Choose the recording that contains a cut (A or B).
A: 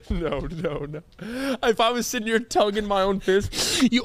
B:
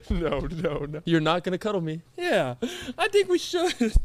B